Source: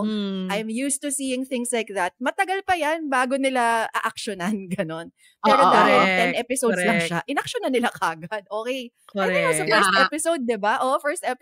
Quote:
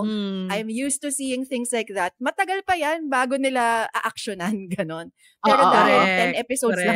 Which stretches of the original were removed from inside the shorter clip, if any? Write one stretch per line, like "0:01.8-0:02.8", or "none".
none